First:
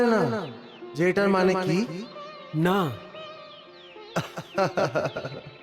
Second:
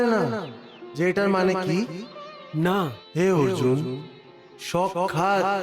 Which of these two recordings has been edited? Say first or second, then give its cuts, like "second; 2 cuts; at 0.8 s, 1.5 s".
second; 1 cut; at 3.0 s